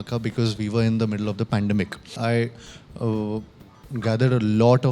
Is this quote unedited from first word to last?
no; 1 cut; at 2.2 s

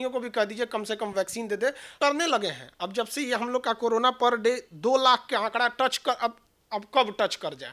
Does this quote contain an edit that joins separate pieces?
yes; 1 cut; at 2.0 s

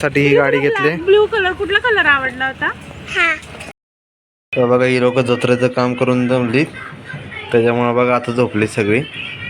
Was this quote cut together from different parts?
yes; 1 cut; at 3.8 s

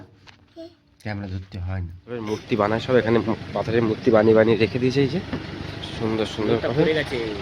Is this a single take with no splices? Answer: no; 1 cut; at 2.2 s

